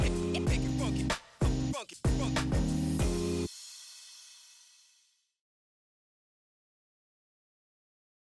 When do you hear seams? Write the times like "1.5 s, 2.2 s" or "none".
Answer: none